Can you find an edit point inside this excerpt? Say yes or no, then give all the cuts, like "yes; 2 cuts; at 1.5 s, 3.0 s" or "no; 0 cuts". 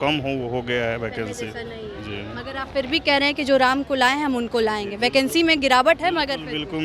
no; 0 cuts